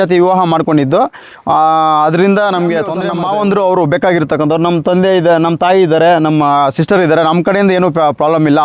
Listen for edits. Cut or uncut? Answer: cut